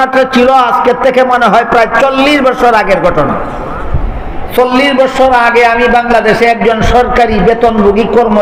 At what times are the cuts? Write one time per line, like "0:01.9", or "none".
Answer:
none